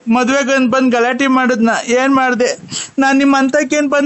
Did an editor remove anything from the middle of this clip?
no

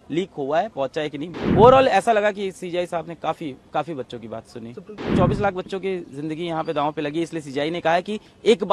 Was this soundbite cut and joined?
yes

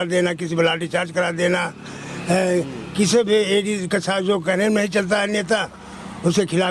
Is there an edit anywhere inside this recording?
no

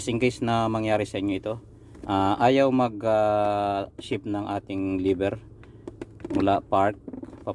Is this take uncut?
yes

